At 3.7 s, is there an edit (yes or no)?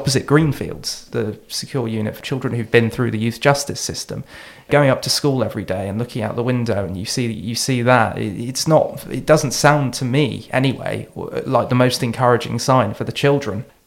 no